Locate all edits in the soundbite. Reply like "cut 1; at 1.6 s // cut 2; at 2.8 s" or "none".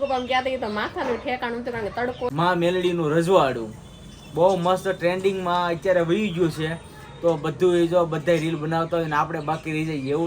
cut 1; at 2.3 s